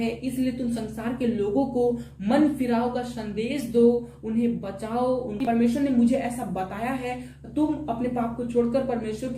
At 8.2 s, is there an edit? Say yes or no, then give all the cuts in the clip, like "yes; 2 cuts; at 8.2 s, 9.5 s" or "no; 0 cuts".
no; 1 cut; at 5.4 s